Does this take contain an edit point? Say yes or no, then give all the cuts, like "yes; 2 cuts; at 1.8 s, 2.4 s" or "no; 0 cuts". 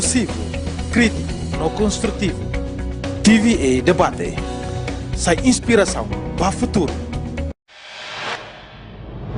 yes; 1 cut; at 7.5 s